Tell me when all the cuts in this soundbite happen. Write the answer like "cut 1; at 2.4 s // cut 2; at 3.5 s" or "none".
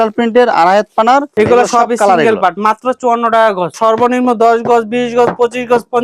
cut 1; at 1.3 s // cut 2; at 3.8 s